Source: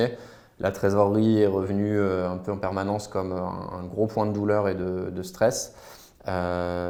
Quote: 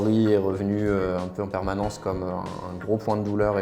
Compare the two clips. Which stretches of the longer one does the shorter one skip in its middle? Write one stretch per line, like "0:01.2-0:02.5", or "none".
none